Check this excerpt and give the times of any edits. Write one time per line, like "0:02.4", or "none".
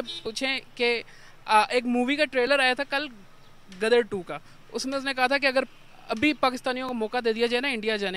none